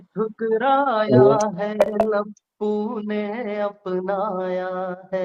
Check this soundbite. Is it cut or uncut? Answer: uncut